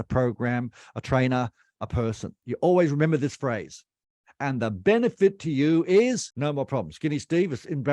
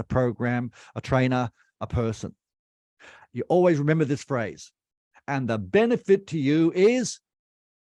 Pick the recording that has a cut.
first; 2 cuts; at 2.3 s, 6.3 s

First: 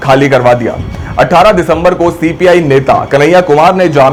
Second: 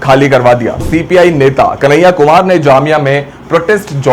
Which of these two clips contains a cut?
second; 1 cut; at 0.9 s

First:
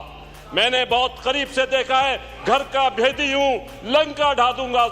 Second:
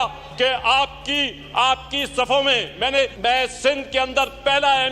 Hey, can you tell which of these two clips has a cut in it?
second; 1 cut; at 3.1 s

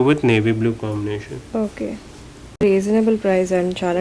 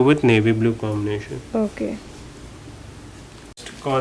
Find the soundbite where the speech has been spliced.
first; 1 cut; at 2.8 s

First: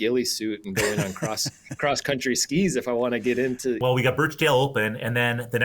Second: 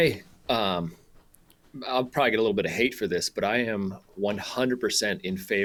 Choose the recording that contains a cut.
first; 1 cut; at 3.8 s

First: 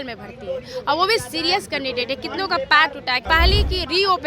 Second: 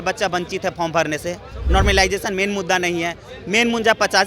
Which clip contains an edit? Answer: first; 1 cut; at 3.3 s

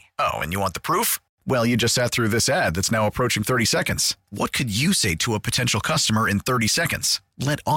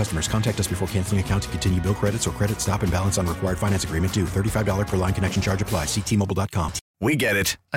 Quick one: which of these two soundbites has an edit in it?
second; 1 cut; at 6.8 s

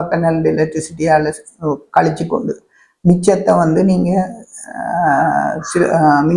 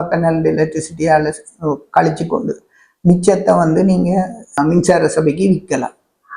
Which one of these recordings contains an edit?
second; 1 cut; at 4.6 s

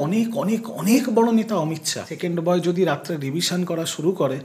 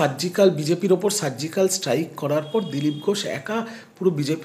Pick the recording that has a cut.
first; 1 cut; at 2.1 s

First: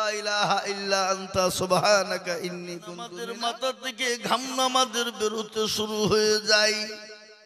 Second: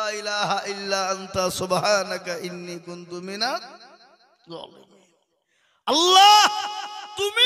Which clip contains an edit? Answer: first; 1 cut; at 3.2 s

